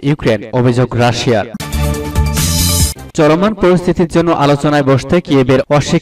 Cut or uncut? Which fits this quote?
cut